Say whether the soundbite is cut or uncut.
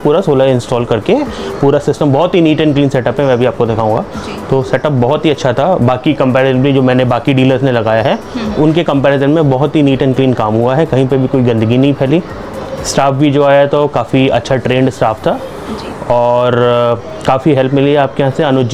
uncut